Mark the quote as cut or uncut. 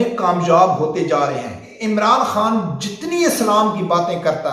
cut